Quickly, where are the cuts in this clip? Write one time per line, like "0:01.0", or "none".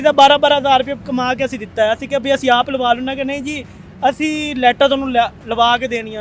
0:01.0